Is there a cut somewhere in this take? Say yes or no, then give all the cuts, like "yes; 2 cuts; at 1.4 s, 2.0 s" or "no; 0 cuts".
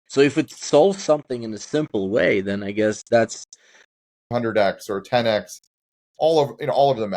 yes; 1 cut; at 4.3 s